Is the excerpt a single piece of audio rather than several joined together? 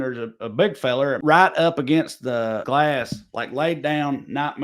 no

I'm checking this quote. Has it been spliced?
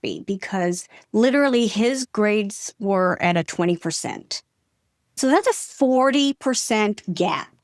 yes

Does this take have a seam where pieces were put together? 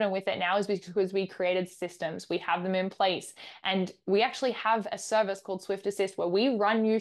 no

